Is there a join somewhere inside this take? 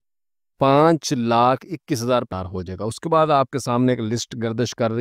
yes; 1 cut; at 2.3 s

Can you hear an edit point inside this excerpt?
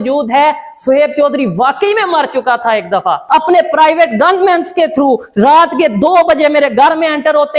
yes; 1 cut; at 3.2 s

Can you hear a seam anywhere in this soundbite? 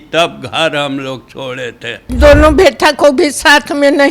yes; 1 cut; at 2.1 s

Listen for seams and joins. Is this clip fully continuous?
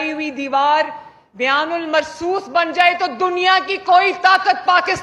yes; 0 cuts

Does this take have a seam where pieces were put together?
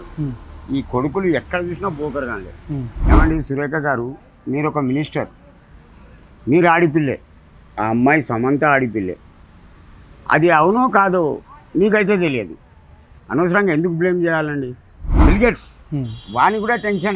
yes; 2 cuts; at 3.0 s, 15.1 s

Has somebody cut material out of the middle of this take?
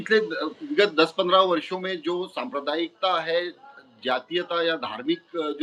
no; 0 cuts

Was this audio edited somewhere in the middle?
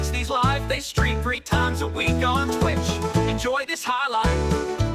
no; 0 cuts

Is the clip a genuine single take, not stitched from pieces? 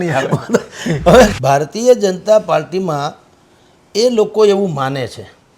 no; 1 cut; at 1.3 s

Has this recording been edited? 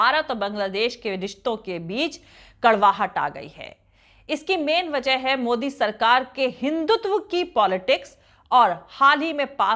no; 0 cuts

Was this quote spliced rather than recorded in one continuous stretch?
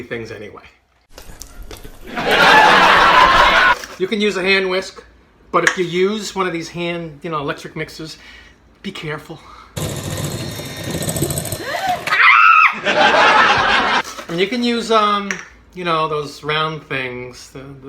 yes; 2 cuts; at 3.7 s, 14.0 s

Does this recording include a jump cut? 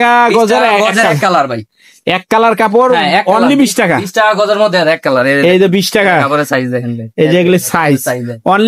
no; 0 cuts

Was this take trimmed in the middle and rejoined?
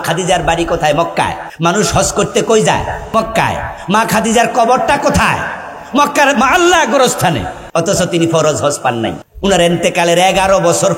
yes; 4 cuts; at 1.4 s, 3.0 s, 7.5 s, 9.3 s

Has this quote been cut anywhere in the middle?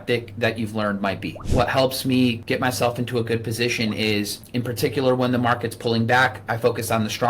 yes; 3 cuts; at 1.4 s, 2.4 s, 4.4 s

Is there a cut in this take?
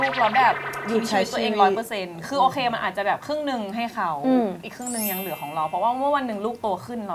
no; 0 cuts

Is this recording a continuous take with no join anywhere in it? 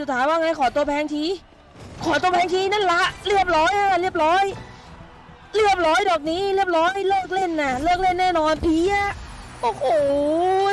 yes; 0 cuts

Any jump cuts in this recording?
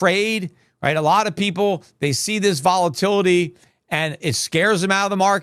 no; 0 cuts

